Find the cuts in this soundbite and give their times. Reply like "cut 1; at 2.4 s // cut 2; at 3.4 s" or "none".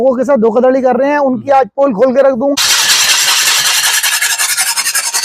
cut 1; at 2.5 s